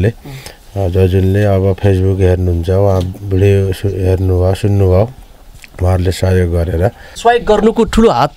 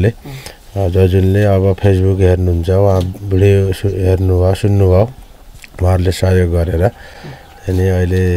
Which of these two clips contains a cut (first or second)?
first